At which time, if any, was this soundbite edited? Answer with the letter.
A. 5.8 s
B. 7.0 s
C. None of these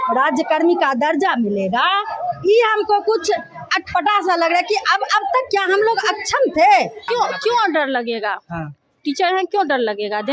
B